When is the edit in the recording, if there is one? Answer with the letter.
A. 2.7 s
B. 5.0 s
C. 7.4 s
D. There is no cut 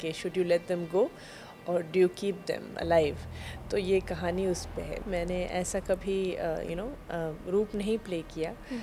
B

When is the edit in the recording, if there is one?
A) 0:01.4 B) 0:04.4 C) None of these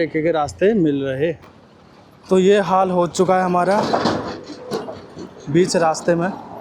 A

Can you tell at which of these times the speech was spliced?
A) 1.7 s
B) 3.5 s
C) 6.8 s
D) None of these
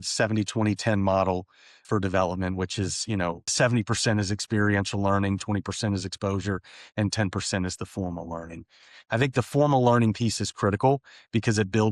B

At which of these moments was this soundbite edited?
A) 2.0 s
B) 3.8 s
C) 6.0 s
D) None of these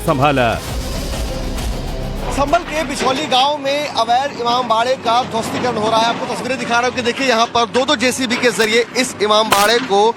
C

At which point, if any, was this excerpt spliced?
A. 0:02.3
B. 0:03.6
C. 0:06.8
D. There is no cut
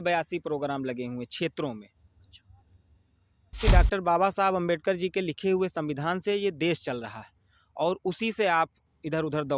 B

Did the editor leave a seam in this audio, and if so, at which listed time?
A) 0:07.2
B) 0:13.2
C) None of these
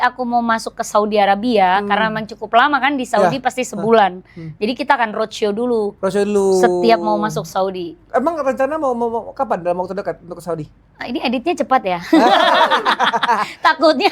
C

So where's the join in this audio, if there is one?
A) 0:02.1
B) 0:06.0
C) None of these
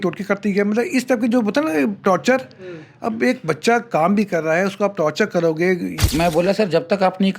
B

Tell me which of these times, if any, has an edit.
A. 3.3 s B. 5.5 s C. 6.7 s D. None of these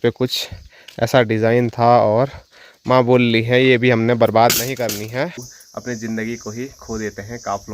B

